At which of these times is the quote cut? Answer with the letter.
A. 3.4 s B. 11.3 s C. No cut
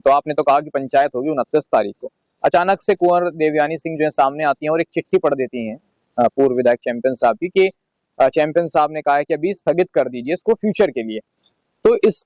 C